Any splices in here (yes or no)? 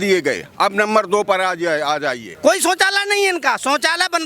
yes